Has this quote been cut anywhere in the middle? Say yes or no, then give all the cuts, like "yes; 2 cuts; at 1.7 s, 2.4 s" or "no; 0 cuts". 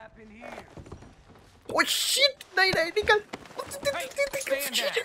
no; 0 cuts